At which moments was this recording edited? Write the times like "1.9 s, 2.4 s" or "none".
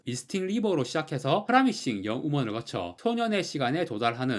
none